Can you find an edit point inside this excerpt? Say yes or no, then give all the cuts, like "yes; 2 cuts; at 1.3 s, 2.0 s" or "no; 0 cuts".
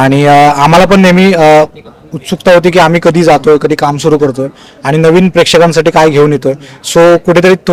no; 0 cuts